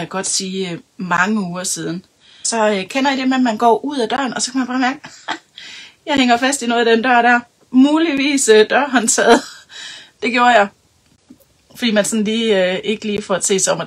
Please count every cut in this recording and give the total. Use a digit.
1